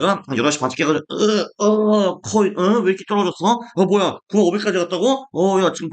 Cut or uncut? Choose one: uncut